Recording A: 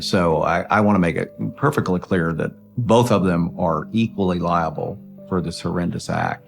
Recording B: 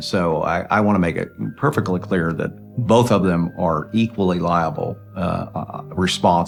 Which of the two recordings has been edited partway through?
A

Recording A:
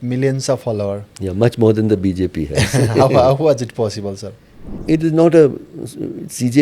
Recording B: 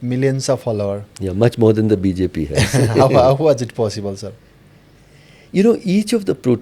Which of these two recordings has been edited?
A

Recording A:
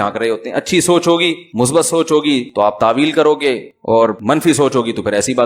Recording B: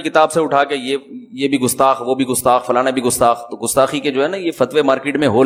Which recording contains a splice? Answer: A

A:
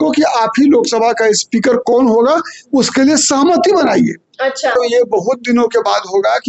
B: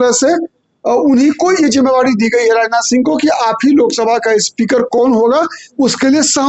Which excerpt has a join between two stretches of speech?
A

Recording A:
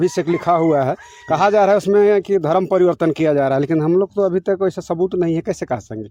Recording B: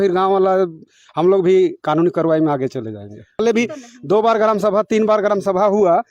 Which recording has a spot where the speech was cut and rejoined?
B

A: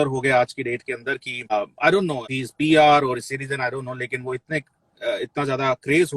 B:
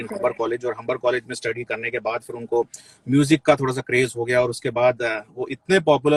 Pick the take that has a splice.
A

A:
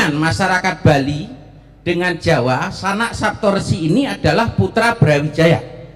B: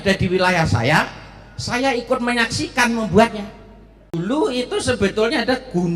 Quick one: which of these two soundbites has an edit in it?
B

